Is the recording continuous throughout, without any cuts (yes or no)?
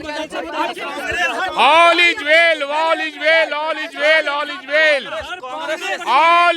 yes